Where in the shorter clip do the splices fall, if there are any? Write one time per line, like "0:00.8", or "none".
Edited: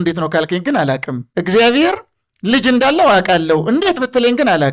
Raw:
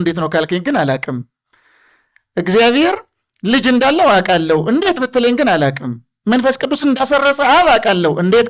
0:01.2